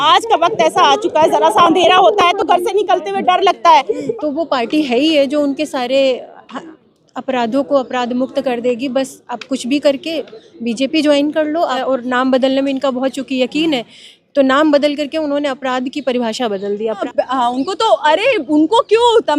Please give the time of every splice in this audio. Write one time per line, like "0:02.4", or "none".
0:04.0
0:11.8
0:17.0